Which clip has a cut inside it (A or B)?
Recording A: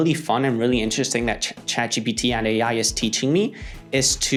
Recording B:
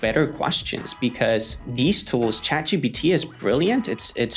B